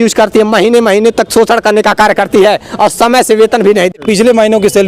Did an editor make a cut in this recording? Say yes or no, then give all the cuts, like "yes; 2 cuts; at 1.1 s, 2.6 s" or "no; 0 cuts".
yes; 1 cut; at 4.0 s